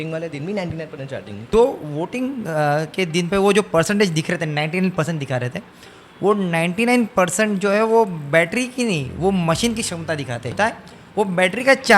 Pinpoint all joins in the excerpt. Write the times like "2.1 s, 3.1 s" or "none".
1.3 s, 10.5 s